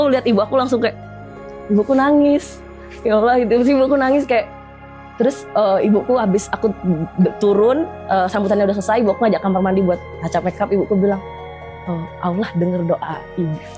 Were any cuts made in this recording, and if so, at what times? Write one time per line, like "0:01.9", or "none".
none

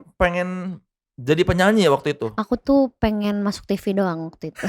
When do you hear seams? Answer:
0:02.3

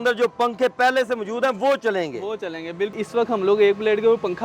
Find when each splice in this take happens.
0:02.9

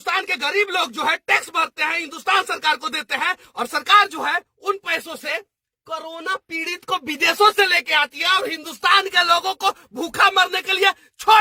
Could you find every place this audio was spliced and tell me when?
none

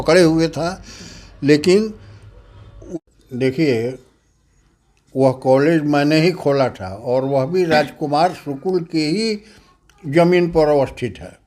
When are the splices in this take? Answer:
0:02.8

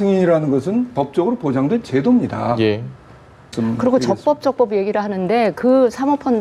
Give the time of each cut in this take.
0:03.5

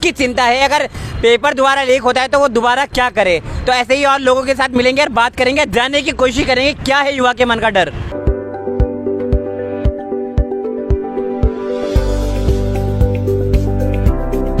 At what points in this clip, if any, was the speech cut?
none

